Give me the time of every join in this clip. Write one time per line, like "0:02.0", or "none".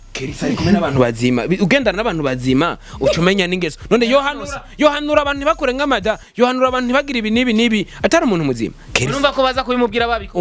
none